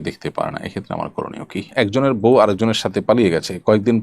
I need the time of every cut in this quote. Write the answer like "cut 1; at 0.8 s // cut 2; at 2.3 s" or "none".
cut 1; at 1.7 s